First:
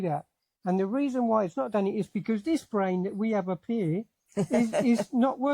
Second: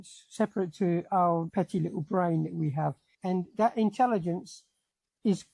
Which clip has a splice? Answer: second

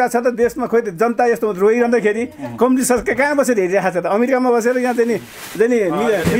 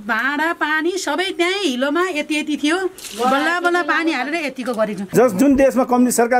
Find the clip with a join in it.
second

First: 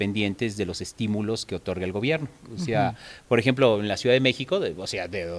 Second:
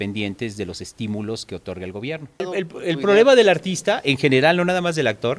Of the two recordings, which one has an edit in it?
second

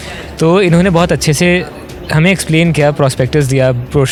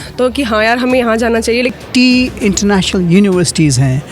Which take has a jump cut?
second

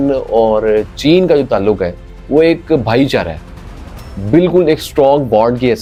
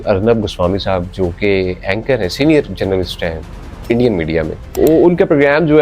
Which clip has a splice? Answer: second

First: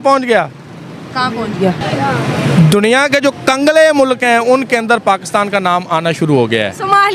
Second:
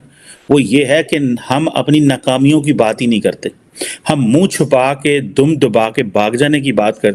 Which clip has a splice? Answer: first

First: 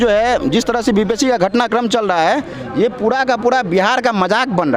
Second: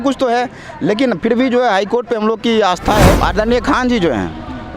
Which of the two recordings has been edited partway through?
second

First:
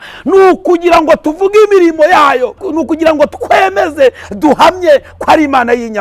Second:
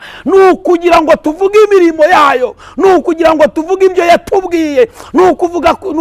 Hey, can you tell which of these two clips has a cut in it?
first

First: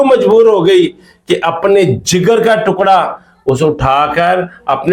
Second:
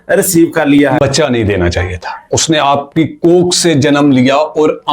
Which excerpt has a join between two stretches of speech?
second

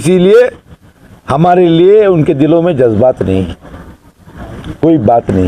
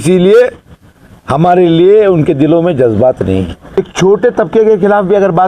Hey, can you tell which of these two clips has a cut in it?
second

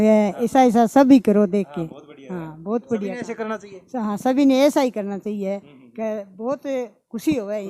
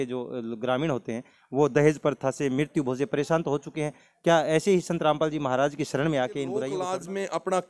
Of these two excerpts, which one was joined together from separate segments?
second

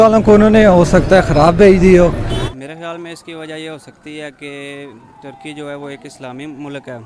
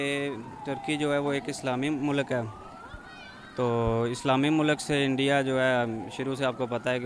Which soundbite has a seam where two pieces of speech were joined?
first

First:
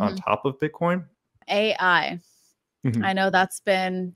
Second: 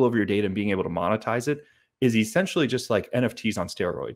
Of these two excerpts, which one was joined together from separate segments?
first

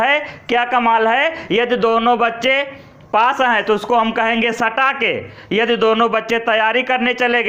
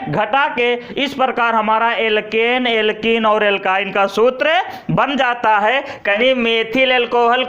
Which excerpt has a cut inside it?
second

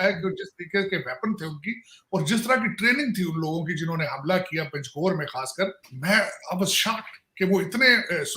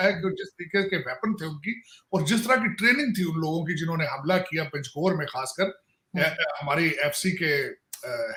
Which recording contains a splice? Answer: first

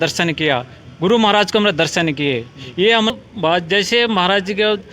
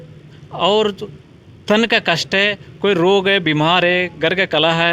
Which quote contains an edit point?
first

